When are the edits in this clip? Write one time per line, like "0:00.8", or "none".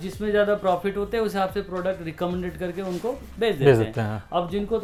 none

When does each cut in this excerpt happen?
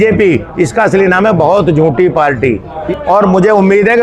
0:02.7

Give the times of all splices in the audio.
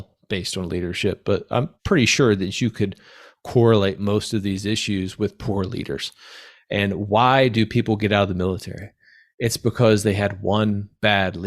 0:01.8

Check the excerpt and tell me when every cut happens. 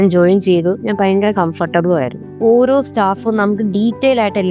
0:02.2

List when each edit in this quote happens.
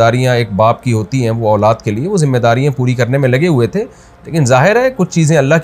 0:03.4

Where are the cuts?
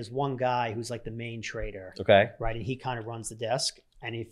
none

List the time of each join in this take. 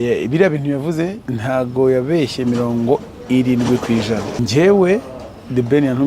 0:01.3
0:04.4

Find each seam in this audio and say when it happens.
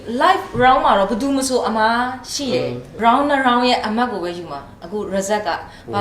0:02.8

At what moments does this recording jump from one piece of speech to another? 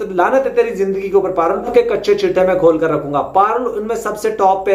0:01.7

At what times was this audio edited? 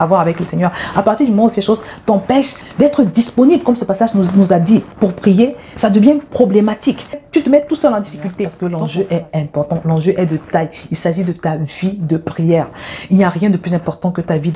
0:08.5

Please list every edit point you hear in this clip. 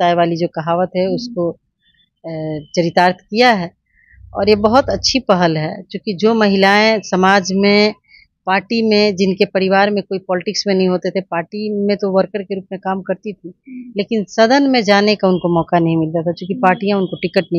none

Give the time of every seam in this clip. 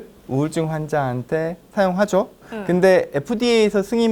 0:02.5

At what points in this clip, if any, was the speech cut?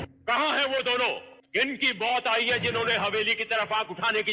none

